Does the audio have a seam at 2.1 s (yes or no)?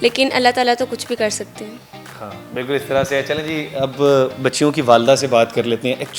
no